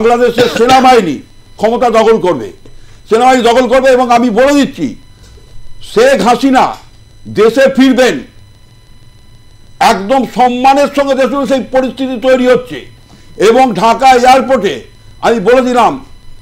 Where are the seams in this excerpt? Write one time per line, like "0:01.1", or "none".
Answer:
0:02.6